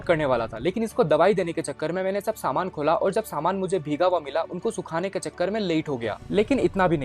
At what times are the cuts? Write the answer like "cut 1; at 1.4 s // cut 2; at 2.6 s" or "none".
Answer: none